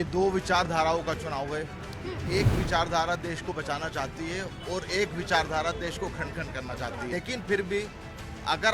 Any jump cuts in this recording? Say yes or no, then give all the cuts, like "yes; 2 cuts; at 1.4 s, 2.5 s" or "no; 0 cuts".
yes; 1 cut; at 7.1 s